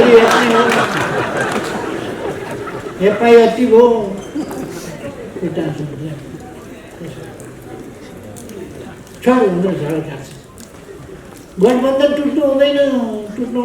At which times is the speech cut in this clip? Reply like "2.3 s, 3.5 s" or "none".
none

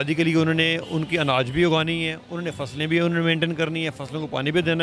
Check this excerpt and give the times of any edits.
none

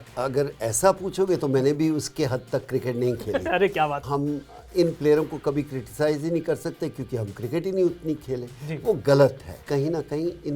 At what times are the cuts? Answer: 4.0 s, 9.5 s

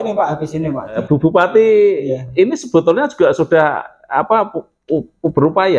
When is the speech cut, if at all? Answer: 1.0 s

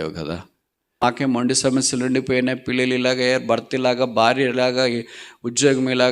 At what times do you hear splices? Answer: 1.0 s

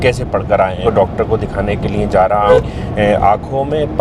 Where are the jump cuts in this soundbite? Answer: 0.8 s, 2.5 s

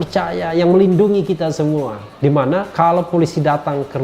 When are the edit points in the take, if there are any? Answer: 2.4 s

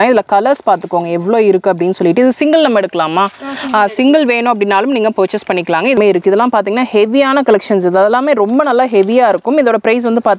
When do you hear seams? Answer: 5.9 s

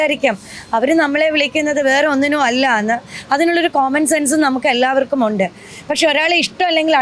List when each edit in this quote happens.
none

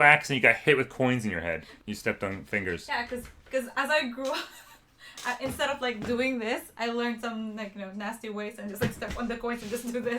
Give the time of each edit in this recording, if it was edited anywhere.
1.7 s

